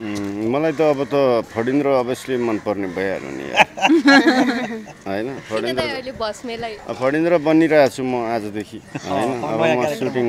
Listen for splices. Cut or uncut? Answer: uncut